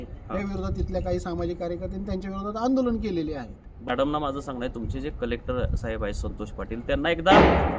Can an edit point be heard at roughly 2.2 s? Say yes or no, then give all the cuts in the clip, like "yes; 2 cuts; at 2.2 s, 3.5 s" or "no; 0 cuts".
no; 1 cut; at 3.9 s